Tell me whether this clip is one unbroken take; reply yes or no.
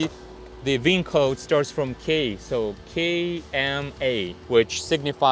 yes